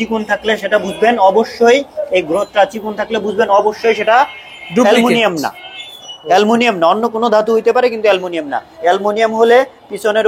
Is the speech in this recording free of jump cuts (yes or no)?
yes